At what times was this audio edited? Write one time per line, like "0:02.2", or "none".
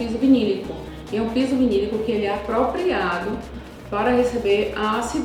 none

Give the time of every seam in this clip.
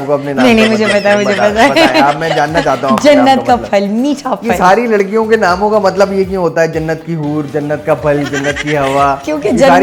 none

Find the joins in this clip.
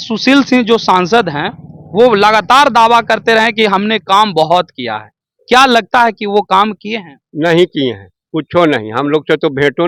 none

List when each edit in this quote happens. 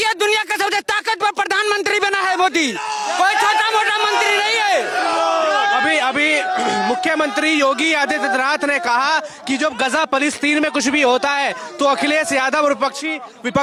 none

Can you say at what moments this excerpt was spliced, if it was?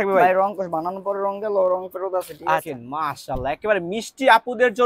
0:02.6

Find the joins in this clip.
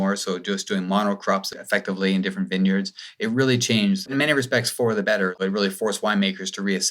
0:04.1
0:05.4

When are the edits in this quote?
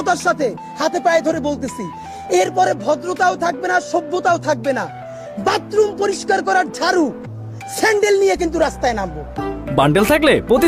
none

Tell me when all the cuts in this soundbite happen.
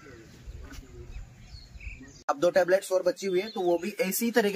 0:01.9

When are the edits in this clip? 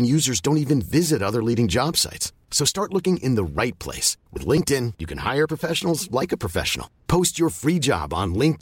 none

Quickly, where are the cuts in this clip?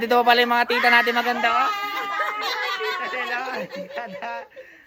none

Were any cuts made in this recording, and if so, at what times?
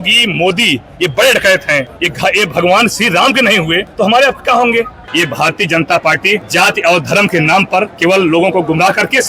0:02.0
0:03.9
0:05.0
0:06.5
0:07.9

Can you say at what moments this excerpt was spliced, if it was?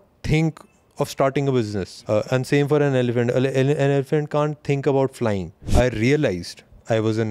0:01.9
0:05.6

